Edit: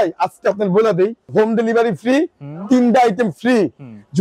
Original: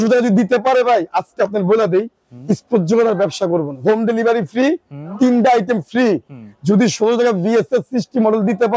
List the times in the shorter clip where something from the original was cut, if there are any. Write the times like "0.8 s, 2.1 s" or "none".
1.2 s